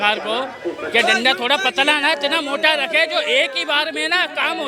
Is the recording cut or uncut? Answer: uncut